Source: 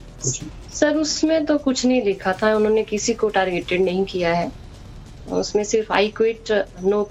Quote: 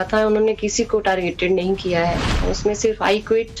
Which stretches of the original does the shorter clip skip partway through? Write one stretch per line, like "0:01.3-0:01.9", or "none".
0:04.6-0:05.2